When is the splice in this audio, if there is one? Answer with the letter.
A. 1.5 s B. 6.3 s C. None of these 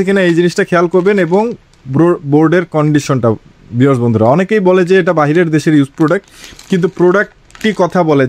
C